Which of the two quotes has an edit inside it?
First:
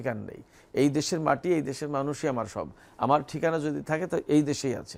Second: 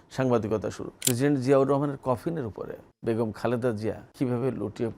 second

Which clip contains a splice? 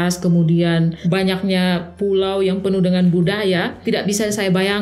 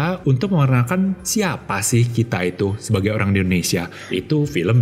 first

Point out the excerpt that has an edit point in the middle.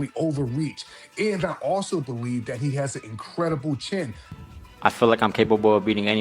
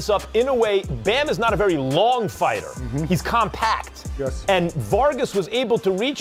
first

